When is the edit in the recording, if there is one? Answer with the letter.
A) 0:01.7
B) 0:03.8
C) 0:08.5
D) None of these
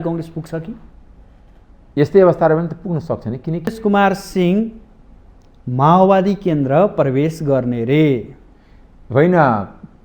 B